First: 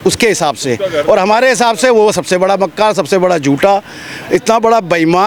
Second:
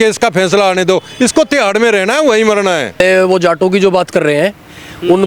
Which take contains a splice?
second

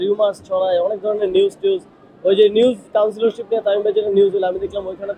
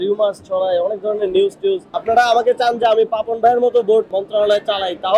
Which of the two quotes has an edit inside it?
second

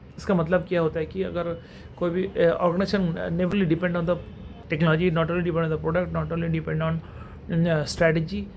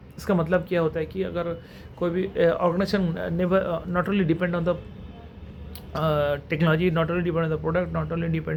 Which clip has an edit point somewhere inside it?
first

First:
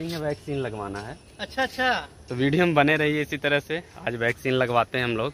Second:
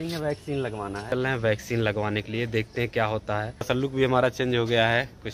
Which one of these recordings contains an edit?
second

